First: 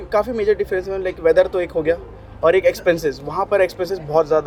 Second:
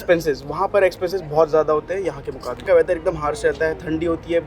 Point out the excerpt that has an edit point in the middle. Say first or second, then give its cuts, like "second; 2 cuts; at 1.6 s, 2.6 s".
second; 1 cut; at 2.6 s